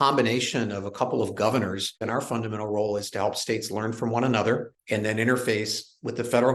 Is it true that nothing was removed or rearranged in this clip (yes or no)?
no